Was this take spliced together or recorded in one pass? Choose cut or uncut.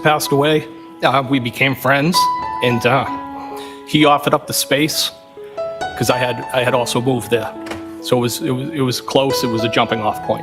uncut